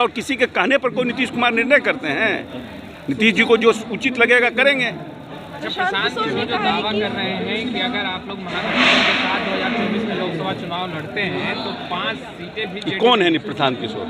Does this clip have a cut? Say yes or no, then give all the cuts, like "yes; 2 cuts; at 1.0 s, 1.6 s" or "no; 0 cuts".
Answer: no; 0 cuts